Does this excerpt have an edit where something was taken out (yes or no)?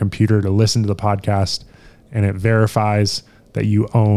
no